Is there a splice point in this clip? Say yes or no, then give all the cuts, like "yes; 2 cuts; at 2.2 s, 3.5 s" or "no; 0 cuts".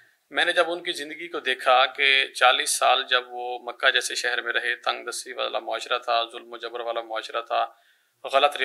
no; 0 cuts